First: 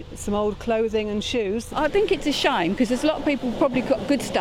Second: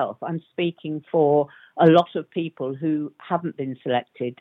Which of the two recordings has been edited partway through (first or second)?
first